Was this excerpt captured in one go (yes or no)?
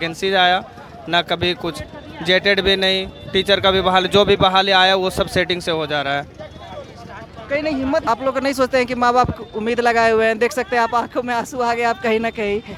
yes